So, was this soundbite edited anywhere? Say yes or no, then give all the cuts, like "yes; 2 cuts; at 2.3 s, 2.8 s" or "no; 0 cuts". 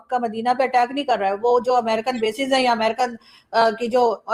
no; 0 cuts